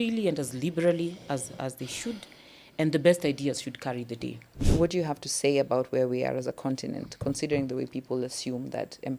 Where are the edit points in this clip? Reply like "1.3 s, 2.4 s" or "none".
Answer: 4.6 s